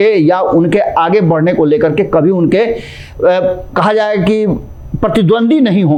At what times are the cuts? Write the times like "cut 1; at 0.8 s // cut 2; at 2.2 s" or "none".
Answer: none